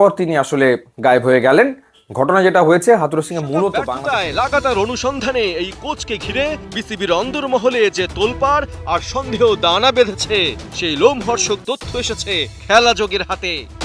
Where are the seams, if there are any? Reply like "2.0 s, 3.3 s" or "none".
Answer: 3.9 s